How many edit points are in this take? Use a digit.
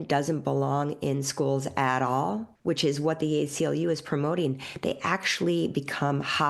1